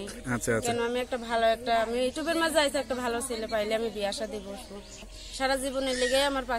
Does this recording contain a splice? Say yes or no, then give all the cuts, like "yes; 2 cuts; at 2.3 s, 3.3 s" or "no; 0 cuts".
yes; 1 cut; at 5.1 s